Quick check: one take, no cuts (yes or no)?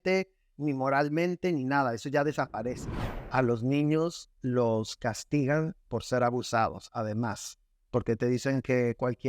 no